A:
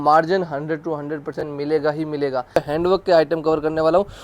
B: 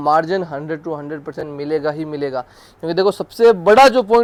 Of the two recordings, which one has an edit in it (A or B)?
A